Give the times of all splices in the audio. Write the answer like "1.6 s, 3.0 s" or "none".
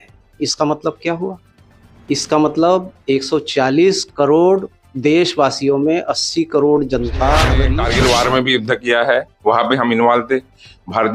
7.6 s